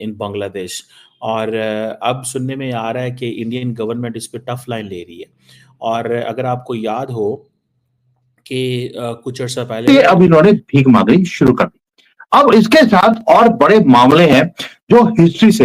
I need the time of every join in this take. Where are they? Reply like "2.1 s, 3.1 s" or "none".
9.9 s